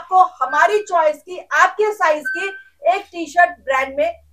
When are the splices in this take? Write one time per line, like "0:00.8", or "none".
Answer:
none